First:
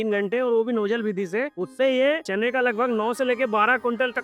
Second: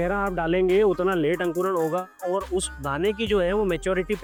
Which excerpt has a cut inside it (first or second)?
first